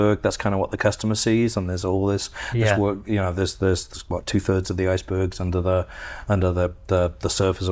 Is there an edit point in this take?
no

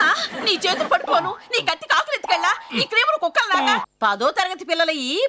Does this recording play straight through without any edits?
no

